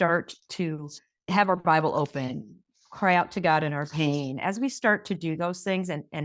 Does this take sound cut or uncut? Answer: cut